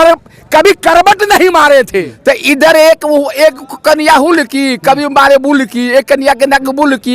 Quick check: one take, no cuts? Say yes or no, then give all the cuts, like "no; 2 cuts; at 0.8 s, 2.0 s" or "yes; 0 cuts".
no; 1 cut; at 2.1 s